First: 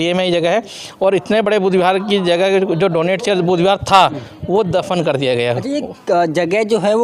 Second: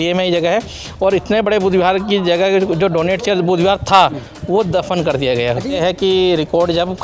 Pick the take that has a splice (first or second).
second